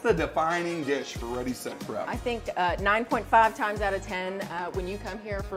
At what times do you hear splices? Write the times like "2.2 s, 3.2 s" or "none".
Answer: none

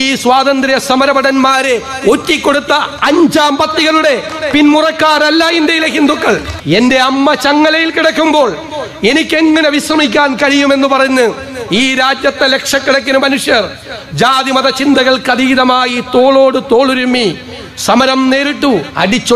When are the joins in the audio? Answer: 6.5 s

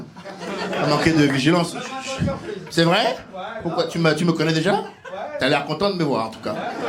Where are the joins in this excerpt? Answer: none

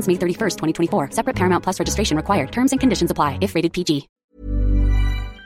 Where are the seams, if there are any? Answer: 4.3 s

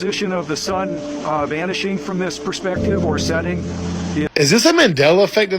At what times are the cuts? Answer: 4.3 s

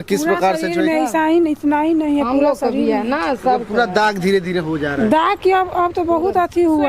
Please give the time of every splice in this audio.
none

